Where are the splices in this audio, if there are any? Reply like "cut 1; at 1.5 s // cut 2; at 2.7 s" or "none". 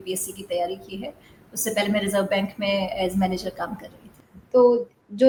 none